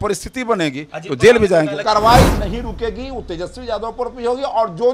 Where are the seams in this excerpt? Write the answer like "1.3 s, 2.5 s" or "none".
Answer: 1.8 s